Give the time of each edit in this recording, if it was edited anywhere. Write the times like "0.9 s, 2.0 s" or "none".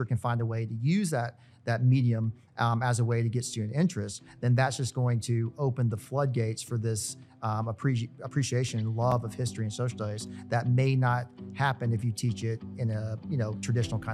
none